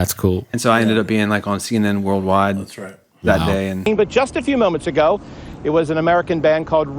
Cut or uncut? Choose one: uncut